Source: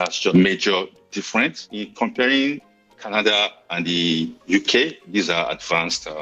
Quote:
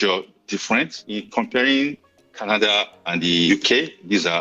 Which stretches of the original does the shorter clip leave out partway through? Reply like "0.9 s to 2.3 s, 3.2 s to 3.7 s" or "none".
4.1 s to 4.5 s